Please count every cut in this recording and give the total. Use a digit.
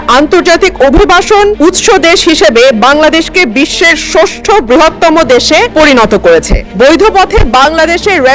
3